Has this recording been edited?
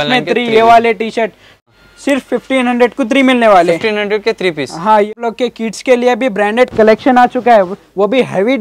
yes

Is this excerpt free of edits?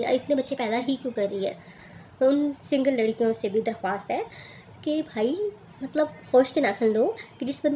no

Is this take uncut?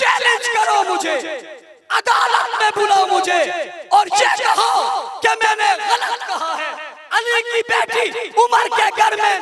yes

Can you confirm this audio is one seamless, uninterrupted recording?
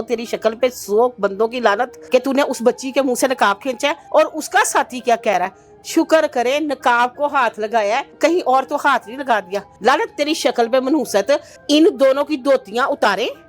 no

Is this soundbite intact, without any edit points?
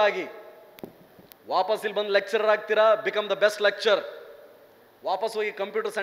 yes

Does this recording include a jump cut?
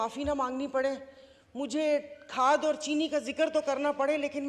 no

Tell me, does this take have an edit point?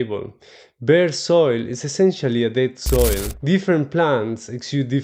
yes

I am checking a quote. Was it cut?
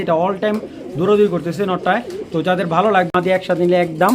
yes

